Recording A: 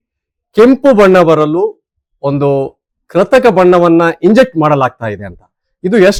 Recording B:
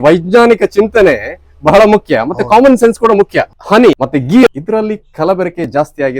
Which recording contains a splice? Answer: B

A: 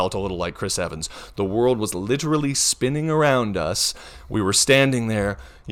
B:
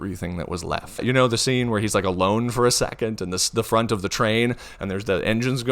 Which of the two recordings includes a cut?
B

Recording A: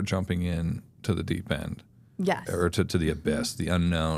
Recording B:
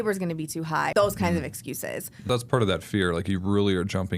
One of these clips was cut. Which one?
B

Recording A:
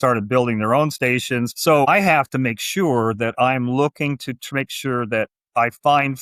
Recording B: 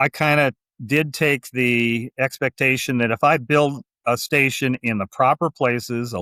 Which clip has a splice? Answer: A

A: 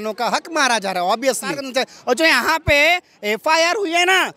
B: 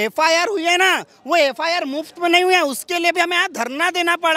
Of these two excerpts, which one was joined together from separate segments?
A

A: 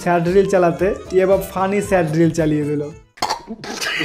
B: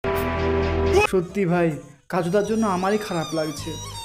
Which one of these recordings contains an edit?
B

